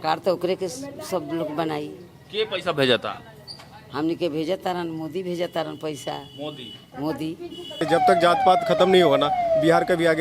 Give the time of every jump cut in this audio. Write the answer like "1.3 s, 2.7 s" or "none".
7.8 s